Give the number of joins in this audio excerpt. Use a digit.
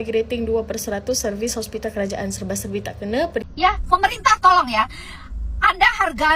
1